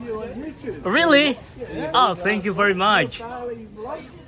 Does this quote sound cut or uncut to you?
uncut